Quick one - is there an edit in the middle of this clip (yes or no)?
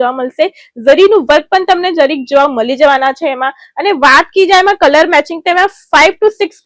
no